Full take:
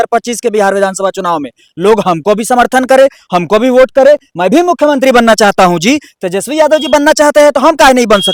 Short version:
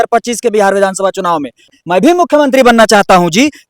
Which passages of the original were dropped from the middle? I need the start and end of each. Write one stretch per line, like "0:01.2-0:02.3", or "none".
0:01.8-0:04.2